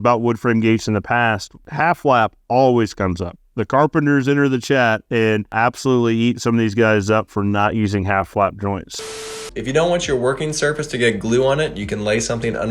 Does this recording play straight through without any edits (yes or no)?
no